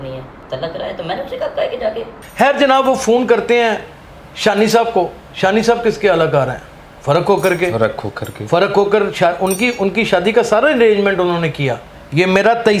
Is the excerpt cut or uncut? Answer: uncut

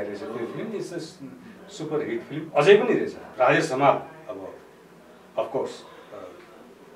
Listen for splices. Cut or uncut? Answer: cut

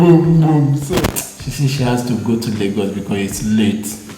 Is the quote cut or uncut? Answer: cut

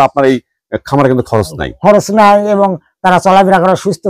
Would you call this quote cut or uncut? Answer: uncut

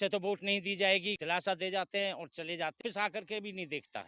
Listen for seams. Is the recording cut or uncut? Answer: cut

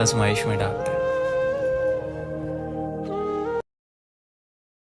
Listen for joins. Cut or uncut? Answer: uncut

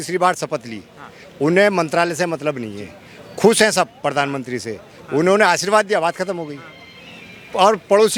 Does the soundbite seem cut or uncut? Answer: uncut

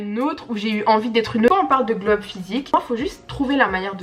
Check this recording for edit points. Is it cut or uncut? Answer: cut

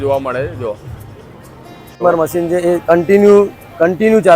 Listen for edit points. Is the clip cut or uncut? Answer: cut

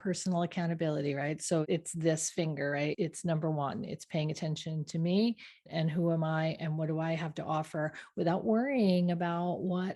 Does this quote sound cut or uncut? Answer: cut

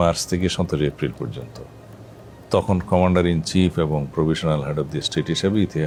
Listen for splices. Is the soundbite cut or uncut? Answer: uncut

